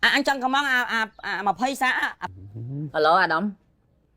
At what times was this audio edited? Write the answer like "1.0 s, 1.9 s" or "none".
2.2 s